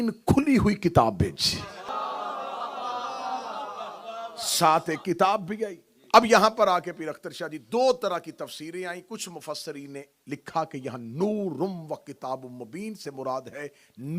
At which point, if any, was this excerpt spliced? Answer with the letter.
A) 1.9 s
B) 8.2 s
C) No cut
A